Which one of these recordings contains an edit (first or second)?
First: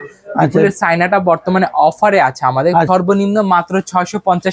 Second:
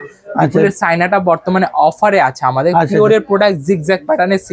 first